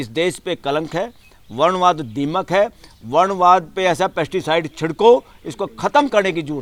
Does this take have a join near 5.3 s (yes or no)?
no